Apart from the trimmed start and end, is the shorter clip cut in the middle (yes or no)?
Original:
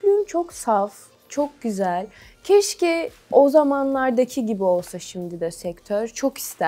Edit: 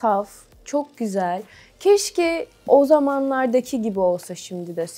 no